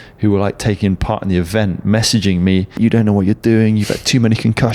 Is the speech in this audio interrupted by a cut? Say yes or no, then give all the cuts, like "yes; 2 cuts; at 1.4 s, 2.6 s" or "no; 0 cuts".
yes; 1 cut; at 2.8 s